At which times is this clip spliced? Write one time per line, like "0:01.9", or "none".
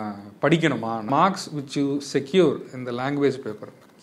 0:01.1